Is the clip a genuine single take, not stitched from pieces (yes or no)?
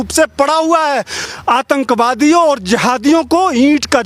no